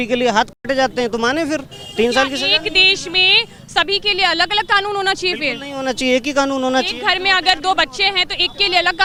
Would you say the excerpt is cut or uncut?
uncut